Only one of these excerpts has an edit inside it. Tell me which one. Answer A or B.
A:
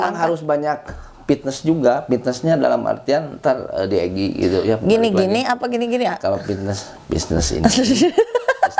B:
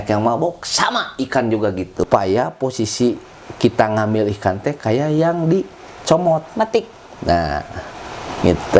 B